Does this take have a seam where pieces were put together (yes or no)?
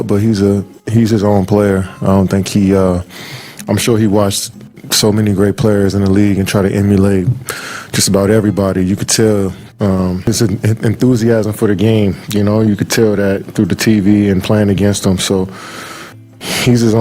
yes